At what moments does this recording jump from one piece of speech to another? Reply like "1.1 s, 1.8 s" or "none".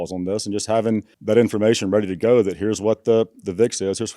1.1 s